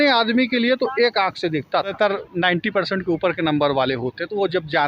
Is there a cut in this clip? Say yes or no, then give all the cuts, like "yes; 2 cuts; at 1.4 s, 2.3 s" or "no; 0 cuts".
yes; 1 cut; at 1.9 s